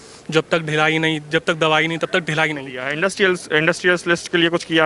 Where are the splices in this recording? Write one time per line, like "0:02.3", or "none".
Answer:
0:02.8